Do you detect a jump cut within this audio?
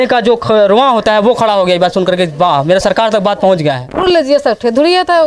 yes; 1 cut; at 3.9 s

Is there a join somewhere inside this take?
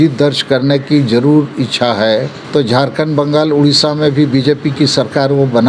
yes; 1 cut; at 2.4 s

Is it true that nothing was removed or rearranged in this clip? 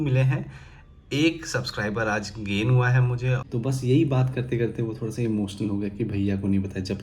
no; 1 cut; at 3.4 s

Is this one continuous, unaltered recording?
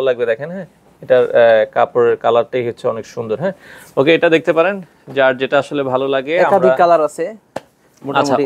yes; 0 cuts

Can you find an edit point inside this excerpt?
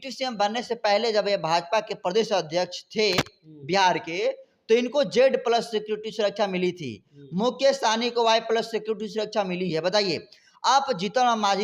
no; 0 cuts

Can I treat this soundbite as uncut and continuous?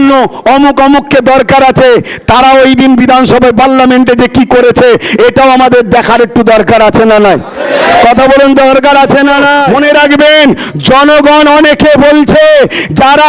no; 1 cut; at 9.7 s

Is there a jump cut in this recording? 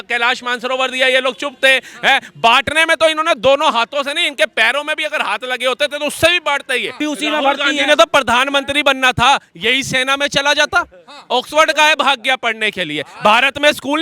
yes; 1 cut; at 7.0 s

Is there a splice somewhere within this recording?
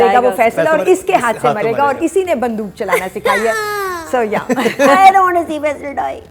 no; 0 cuts

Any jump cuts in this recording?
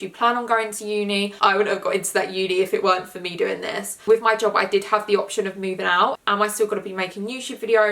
yes; 3 cuts; at 1.3 s, 3.9 s, 6.2 s

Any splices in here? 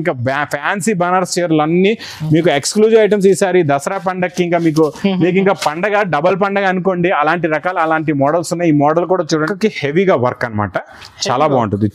yes; 1 cut; at 9.4 s

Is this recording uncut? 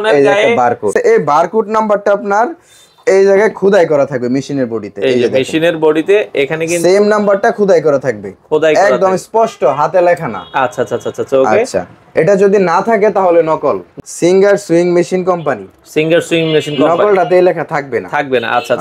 no; 2 cuts; at 0.9 s, 13.9 s

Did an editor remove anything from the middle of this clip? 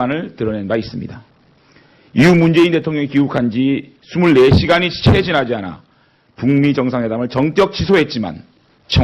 yes; 1 cut; at 6.8 s

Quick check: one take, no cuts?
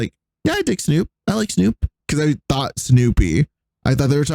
no; 1 cut; at 2.0 s

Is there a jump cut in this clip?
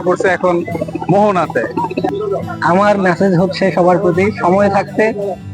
yes; 1 cut; at 2.1 s

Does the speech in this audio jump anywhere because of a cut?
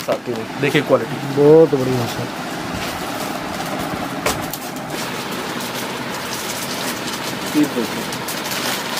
no; 0 cuts

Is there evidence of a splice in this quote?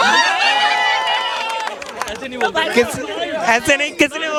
no; 0 cuts

